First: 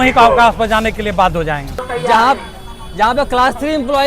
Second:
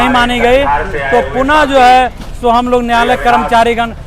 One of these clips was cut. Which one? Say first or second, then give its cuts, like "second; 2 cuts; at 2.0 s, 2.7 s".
first; 1 cut; at 1.9 s